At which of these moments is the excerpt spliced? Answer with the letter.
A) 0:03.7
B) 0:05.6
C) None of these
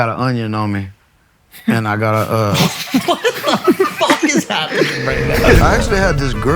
B